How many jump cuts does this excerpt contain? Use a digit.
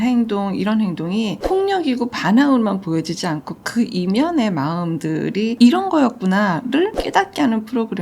1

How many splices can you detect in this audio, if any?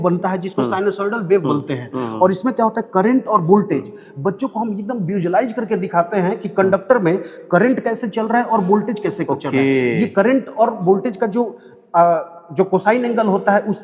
0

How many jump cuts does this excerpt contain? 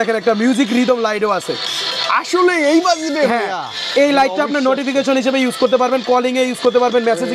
0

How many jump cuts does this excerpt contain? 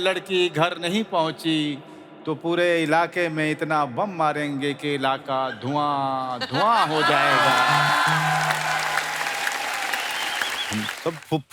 1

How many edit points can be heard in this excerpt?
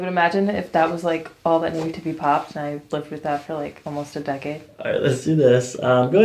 0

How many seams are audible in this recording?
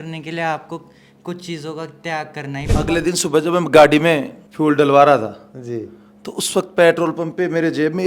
1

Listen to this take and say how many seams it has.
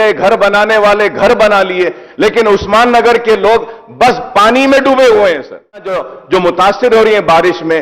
1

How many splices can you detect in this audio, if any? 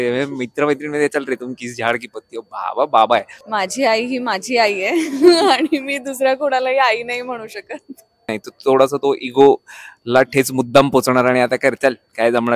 2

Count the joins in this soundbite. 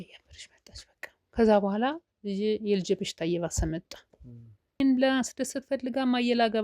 1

